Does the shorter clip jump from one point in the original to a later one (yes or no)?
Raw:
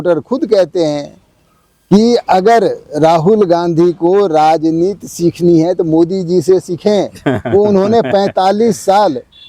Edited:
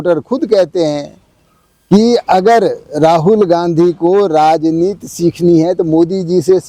no